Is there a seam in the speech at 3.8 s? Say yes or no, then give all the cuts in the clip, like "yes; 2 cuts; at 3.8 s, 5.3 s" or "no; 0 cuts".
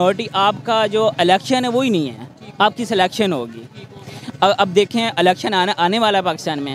no; 0 cuts